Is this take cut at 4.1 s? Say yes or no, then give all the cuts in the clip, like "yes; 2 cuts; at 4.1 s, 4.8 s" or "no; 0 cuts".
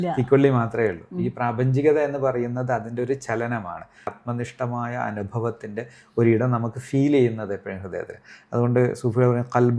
yes; 1 cut; at 4.1 s